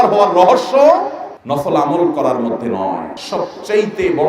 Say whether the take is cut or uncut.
cut